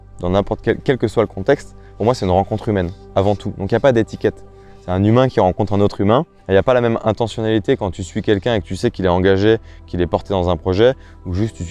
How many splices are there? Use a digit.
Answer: 1